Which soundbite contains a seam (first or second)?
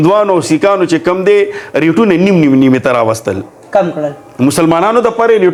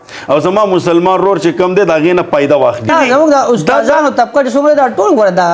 second